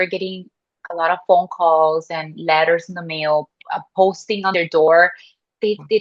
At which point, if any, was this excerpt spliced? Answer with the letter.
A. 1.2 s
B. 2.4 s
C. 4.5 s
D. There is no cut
C